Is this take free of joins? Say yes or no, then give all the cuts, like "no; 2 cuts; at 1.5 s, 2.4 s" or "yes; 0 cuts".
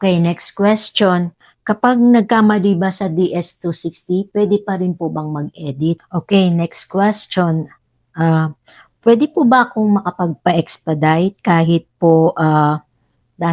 no; 1 cut; at 6.1 s